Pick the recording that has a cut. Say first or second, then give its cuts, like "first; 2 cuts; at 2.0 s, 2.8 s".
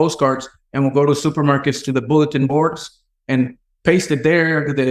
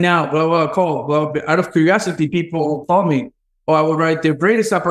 first; 1 cut; at 3.6 s